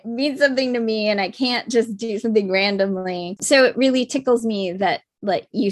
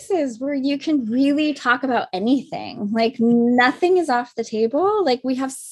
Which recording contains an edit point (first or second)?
first